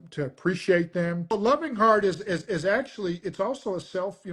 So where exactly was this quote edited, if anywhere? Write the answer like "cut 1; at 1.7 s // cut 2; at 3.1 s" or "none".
cut 1; at 1.3 s